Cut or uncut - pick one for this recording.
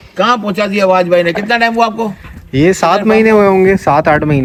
uncut